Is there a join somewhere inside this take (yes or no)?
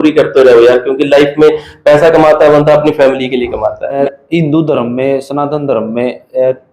yes